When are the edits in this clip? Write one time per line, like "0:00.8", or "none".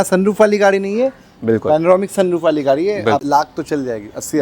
0:03.2